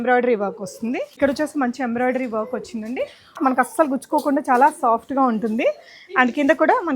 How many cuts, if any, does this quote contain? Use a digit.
2